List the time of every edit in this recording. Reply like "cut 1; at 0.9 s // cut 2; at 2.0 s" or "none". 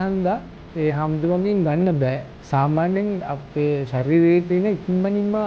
cut 1; at 2.3 s